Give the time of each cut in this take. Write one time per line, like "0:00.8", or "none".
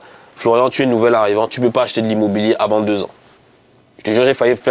none